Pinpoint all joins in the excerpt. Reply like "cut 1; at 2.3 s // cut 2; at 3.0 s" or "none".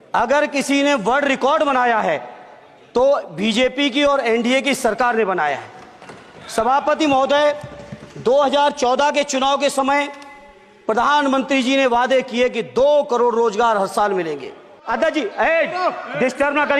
cut 1; at 14.7 s